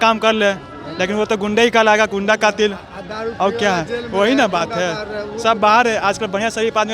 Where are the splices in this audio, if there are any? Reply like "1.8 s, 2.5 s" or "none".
none